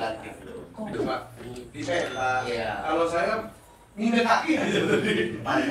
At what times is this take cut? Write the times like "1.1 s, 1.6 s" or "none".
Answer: 0.9 s